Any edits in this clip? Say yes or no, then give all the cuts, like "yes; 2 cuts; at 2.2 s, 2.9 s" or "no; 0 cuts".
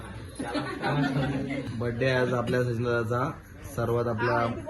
yes; 1 cut; at 1.7 s